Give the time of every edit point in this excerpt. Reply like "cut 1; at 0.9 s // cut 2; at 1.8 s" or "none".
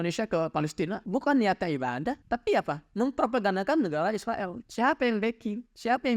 cut 1; at 1.0 s // cut 2; at 2.2 s

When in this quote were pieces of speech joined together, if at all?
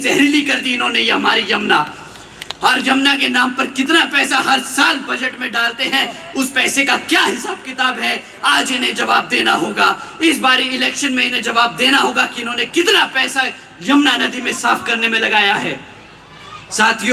none

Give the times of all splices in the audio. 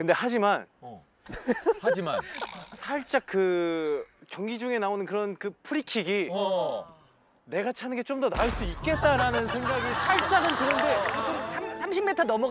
cut 1; at 11.1 s

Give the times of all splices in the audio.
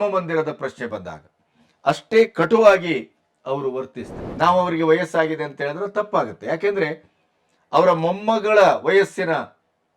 cut 1; at 4.2 s

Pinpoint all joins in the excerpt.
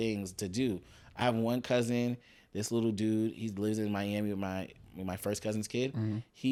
none

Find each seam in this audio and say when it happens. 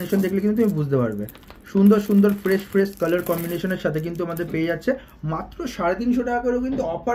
none

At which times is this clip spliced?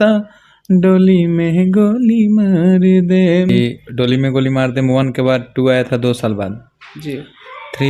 cut 1; at 3.6 s

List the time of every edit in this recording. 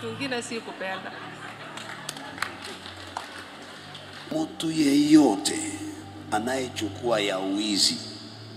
cut 1; at 4.3 s

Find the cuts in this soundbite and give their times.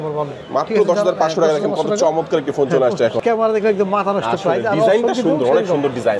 cut 1; at 3.2 s

